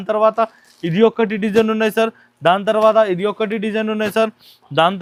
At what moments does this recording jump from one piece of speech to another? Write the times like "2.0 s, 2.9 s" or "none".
none